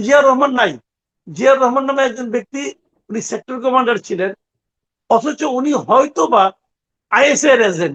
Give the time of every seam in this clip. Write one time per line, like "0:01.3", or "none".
none